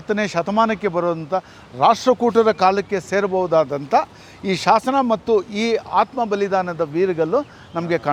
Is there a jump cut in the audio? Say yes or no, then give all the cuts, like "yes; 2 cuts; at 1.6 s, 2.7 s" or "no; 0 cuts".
no; 0 cuts